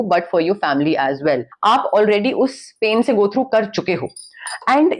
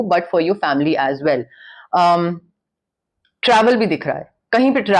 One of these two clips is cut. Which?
first; 1 cut; at 1.5 s

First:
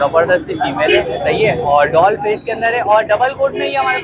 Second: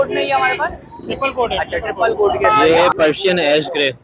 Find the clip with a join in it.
second; 1 cut; at 2.5 s

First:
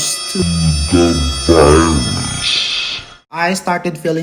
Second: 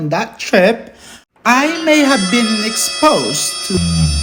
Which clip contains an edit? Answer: first; 1 cut; at 3.3 s

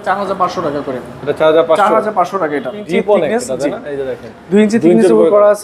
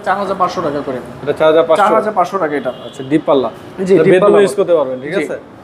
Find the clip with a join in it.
first; 1 cut; at 2.8 s

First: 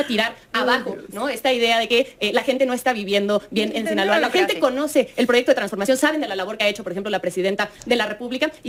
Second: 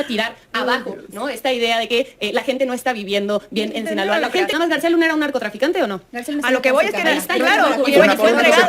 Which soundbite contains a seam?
second; 1 cut; at 4.5 s

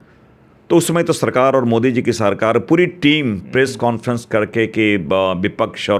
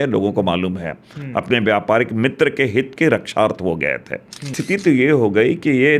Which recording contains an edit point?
second; 1 cut; at 4.6 s

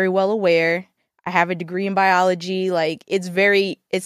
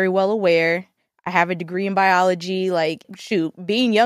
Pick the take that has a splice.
second; 1 cut; at 3.0 s

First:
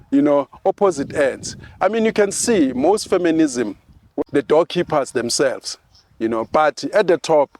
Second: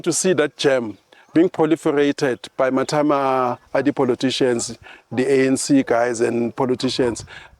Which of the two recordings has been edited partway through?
first; 1 cut; at 4.1 s

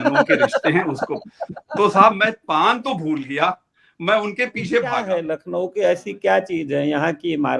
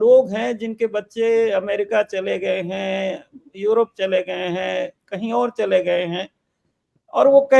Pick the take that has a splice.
first; 1 cut; at 5.3 s

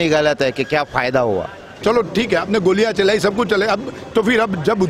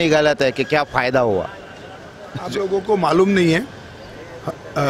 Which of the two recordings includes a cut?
first; 1 cut; at 1.8 s

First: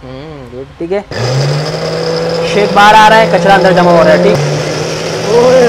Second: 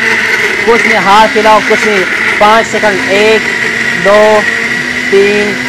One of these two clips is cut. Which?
first; 2 cuts; at 1.1 s, 4.4 s

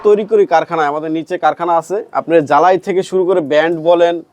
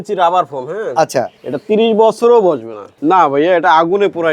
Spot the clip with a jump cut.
second; 2 cuts; at 1.4 s, 3.0 s

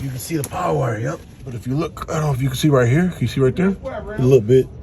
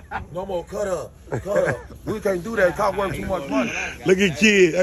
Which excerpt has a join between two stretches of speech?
first; 1 cut; at 1.5 s

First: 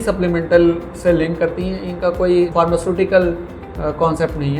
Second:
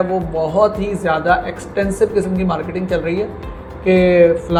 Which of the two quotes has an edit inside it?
first; 1 cut; at 2.5 s

